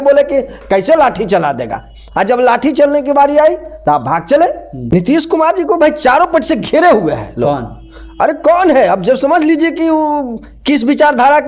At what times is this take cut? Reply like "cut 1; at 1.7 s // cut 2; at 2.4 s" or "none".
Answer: cut 1; at 4.7 s